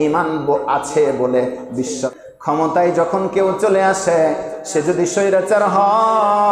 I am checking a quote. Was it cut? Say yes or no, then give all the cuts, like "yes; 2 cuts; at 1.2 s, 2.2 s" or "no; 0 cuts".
yes; 1 cut; at 2.1 s